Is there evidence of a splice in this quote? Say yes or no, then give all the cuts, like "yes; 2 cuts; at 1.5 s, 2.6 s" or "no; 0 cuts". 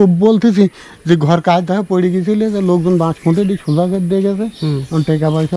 no; 0 cuts